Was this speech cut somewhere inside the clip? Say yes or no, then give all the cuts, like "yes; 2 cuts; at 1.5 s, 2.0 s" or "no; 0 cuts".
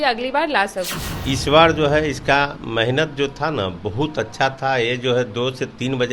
yes; 1 cut; at 1.0 s